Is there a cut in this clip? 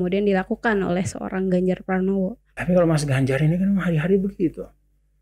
yes; 1 cut; at 2.5 s

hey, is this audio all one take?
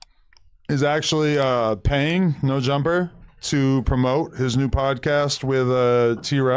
yes; 0 cuts

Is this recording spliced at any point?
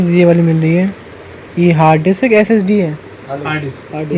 no; 0 cuts

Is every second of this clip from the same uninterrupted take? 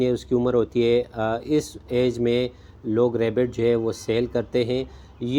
yes; 0 cuts

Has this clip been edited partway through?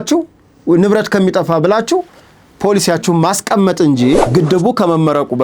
yes; 1 cut; at 4.3 s

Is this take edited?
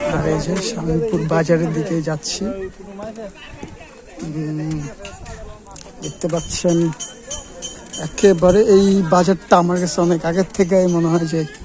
no; 0 cuts

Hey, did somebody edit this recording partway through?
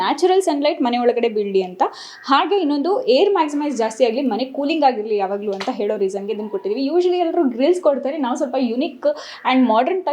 no; 0 cuts

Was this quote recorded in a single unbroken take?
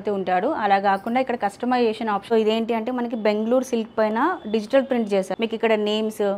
no; 2 cuts; at 2.2 s, 5.3 s

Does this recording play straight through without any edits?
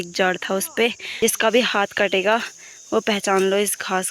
no; 1 cut; at 1.1 s

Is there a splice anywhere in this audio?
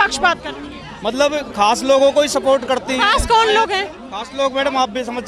no; 0 cuts

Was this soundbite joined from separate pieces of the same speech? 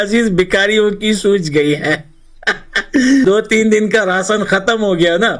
yes; 1 cut; at 3.2 s

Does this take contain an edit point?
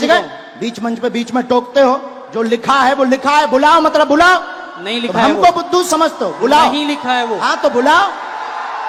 no; 0 cuts

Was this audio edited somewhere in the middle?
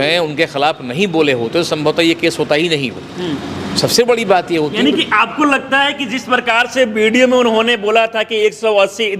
no; 0 cuts

